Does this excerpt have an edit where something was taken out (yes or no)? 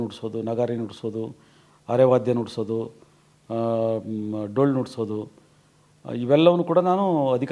no